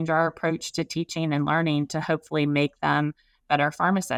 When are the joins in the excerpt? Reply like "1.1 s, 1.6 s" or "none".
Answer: none